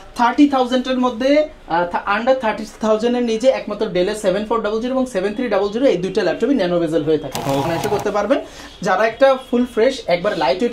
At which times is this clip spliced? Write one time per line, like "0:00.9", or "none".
0:07.7